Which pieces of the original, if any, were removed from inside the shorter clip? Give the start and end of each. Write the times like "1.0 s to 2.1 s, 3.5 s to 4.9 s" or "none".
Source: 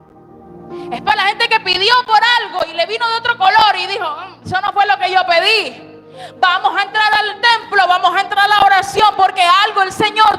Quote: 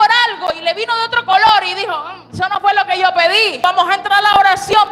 5.7 s to 7.9 s